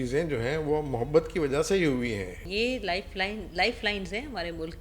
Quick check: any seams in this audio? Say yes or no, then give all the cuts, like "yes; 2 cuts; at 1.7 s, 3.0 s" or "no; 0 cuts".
yes; 1 cut; at 2.4 s